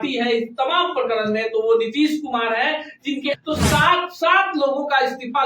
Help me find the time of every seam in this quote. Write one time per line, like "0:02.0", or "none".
0:03.4